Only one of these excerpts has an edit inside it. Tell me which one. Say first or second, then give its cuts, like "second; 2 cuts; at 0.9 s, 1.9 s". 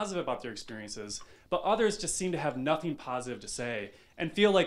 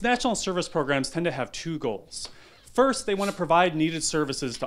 first; 1 cut; at 1.3 s